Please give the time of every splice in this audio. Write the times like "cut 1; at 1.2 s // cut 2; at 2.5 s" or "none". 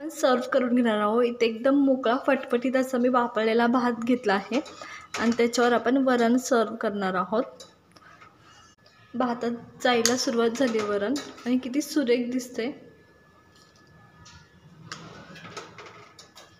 cut 1; at 9.1 s